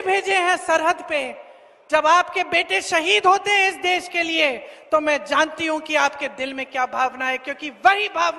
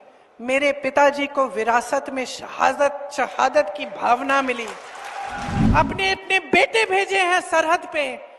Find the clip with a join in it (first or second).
second